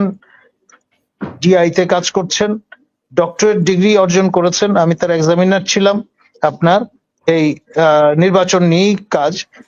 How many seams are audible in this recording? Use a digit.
0